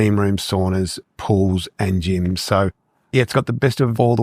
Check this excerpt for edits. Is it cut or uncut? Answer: uncut